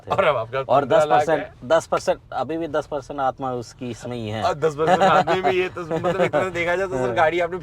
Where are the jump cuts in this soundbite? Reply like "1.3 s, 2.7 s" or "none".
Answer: none